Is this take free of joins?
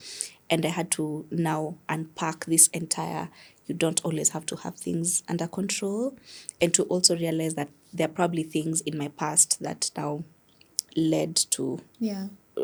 yes; 0 cuts

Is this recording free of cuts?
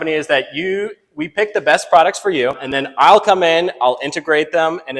no; 1 cut; at 2.7 s

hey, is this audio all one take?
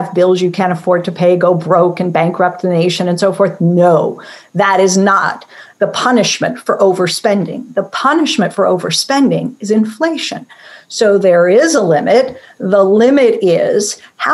yes; 0 cuts

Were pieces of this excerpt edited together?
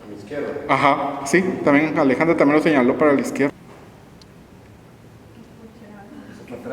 yes; 1 cut; at 3.5 s

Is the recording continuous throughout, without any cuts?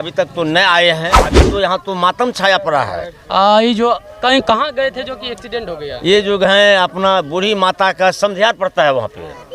no; 1 cut; at 1.4 s

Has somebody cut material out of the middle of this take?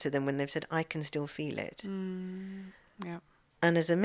no; 0 cuts

